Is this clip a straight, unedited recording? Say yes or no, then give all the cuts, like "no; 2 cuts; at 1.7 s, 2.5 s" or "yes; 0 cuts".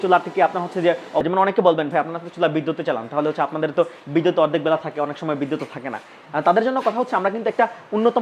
no; 1 cut; at 1.2 s